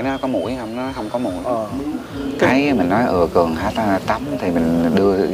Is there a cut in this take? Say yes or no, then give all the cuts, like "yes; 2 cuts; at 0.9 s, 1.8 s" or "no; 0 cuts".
yes; 1 cut; at 2.4 s